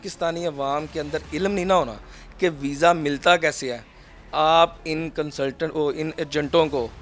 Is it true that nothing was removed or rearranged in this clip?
yes; 0 cuts

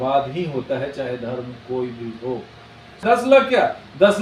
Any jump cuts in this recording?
yes; 1 cut; at 3.0 s

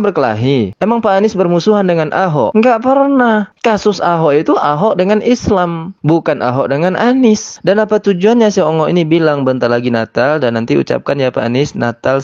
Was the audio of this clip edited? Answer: yes; 1 cut; at 7.5 s

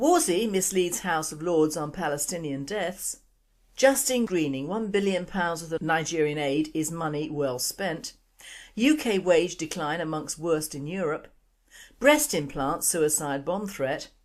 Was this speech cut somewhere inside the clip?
yes; 1 cut; at 5.0 s

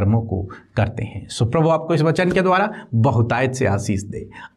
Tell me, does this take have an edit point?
no; 0 cuts

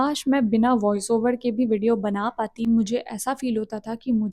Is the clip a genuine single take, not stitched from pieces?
no; 1 cut; at 2.6 s

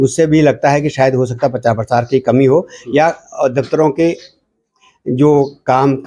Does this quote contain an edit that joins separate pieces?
no; 0 cuts

